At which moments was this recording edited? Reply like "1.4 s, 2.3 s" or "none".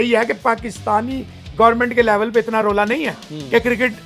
none